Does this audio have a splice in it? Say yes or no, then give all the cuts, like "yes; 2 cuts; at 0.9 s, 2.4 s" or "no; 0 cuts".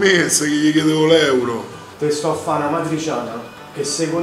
yes; 1 cut; at 1.9 s